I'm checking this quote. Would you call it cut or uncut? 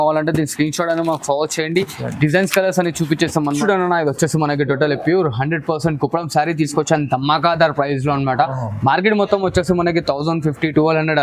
cut